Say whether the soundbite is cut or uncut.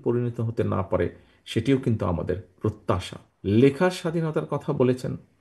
cut